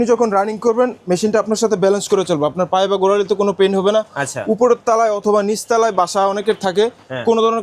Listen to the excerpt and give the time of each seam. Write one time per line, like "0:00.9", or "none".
none